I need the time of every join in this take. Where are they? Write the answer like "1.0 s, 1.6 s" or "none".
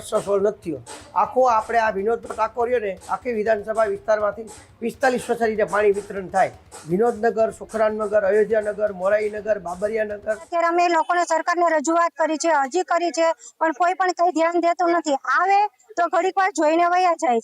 10.5 s